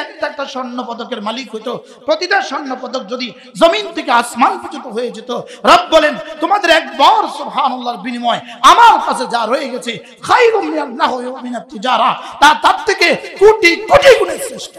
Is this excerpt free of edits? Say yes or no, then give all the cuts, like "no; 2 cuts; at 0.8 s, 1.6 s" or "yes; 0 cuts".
yes; 0 cuts